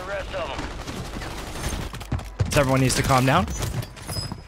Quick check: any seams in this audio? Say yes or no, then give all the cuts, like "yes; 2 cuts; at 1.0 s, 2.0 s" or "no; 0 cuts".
yes; 1 cut; at 1.9 s